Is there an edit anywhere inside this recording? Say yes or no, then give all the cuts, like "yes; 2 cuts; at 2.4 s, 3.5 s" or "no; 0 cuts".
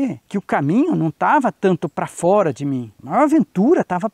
no; 0 cuts